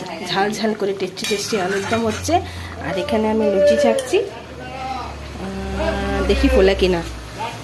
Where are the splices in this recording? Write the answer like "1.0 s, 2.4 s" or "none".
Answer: none